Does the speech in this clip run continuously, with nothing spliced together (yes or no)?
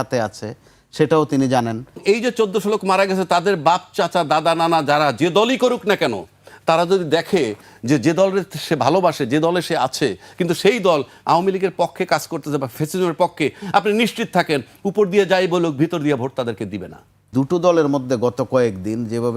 no